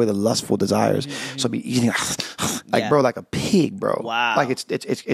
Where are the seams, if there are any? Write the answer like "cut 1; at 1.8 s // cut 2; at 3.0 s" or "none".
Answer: none